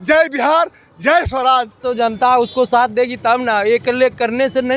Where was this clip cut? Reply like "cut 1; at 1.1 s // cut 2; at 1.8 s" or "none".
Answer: cut 1; at 1.8 s